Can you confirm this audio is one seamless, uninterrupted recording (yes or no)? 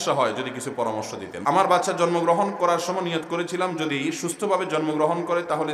no